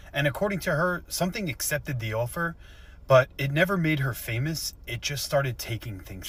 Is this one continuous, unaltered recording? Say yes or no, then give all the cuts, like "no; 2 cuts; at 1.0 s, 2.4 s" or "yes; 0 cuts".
yes; 0 cuts